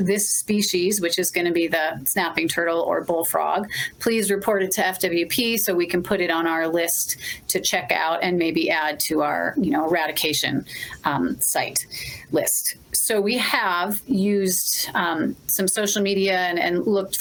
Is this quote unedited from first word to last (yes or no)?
yes